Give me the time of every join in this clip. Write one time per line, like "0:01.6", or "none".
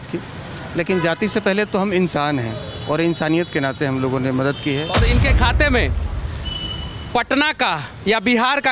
0:05.1